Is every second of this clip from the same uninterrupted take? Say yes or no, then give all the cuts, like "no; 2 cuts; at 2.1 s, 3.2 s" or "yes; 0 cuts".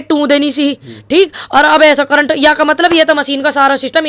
yes; 0 cuts